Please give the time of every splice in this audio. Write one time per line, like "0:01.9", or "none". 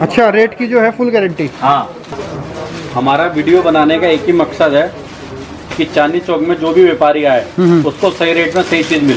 0:02.0